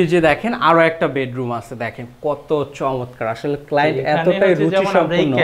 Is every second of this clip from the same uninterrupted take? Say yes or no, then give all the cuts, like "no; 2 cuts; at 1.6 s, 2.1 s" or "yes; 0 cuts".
yes; 0 cuts